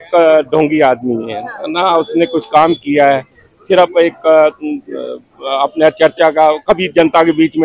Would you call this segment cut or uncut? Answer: uncut